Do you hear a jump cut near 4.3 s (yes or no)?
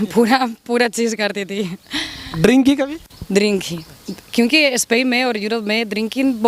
no